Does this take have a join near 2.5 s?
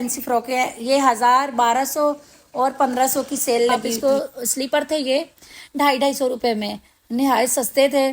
no; 1 cut; at 3.9 s

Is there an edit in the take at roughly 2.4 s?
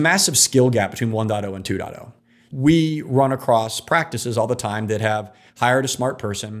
yes; 1 cut; at 2.4 s

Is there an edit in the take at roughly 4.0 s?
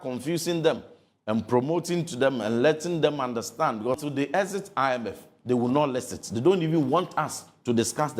yes; 1 cut; at 4.0 s

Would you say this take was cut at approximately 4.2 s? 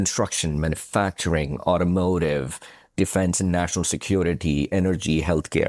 no; 1 cut; at 2.9 s

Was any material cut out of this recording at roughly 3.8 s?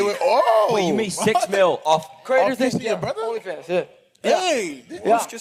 no; 0 cuts

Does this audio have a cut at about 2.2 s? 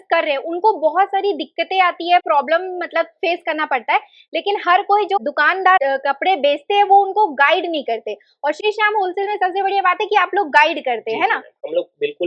no; 0 cuts

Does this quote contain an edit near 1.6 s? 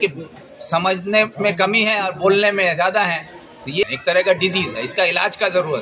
no; 1 cut; at 3.8 s

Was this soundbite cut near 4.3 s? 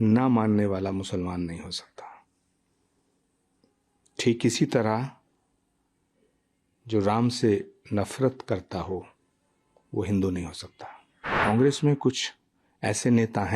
no; 1 cut; at 11.3 s

